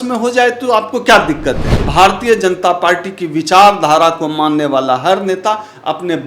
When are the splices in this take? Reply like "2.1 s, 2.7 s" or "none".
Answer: 1.7 s